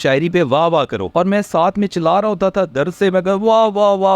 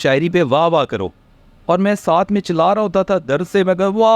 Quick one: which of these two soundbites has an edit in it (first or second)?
first